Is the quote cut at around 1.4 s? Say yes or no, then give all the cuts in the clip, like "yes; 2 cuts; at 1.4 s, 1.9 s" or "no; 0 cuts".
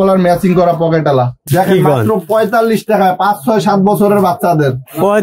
yes; 1 cut; at 1.4 s